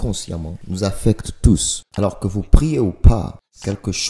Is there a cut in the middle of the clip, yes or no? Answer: yes